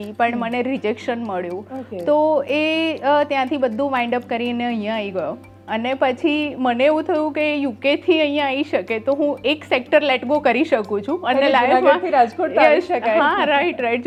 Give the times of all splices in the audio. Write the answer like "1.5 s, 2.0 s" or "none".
none